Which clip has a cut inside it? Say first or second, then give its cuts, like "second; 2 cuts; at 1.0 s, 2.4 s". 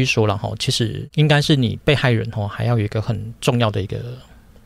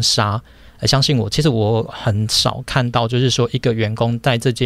first; 1 cut; at 1.0 s